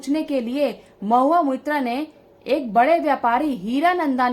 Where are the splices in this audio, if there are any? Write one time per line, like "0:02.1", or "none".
none